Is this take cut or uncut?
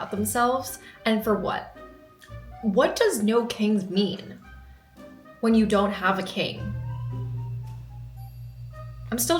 uncut